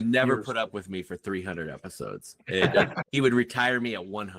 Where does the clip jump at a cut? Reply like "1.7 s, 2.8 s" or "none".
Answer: 3.0 s